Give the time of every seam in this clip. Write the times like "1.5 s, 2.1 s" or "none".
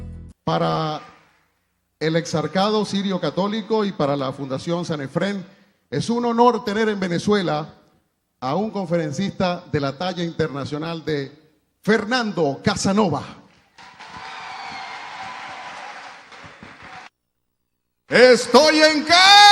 none